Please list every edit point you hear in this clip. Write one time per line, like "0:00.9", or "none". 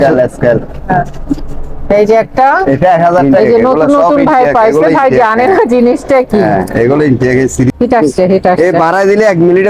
0:03.2
0:07.7